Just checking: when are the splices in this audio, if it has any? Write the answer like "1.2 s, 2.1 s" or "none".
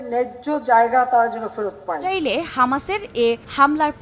2.1 s